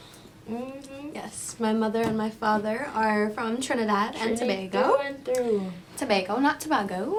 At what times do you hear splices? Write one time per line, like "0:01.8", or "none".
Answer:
none